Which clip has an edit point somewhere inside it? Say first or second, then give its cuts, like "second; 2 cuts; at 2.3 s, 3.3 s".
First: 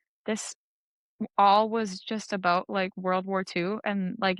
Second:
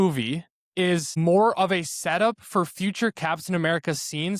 second; 1 cut; at 1.1 s